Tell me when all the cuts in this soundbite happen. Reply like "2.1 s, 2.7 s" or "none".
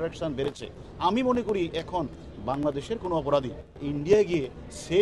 3.8 s